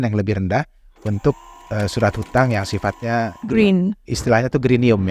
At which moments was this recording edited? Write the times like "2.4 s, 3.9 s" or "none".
4.1 s

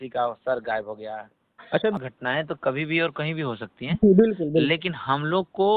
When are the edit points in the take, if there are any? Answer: 2.0 s

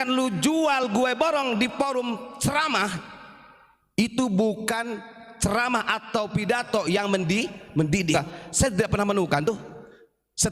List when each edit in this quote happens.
8.1 s

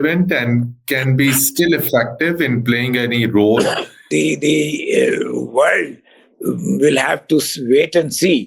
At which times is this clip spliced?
4.0 s

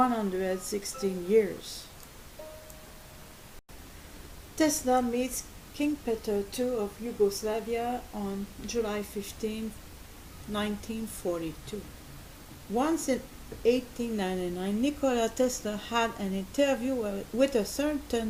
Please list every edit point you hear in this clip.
none

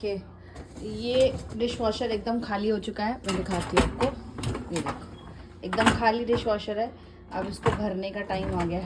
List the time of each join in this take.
none

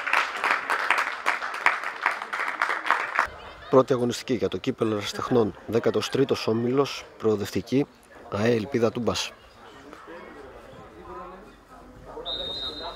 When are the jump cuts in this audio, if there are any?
3.3 s

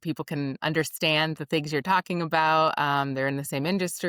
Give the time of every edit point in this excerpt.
none

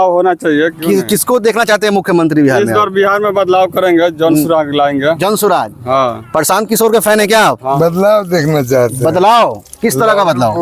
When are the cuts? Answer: 7.8 s

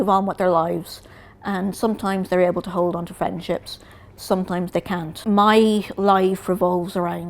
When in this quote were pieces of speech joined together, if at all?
5.1 s

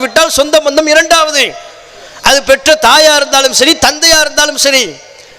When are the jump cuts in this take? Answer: none

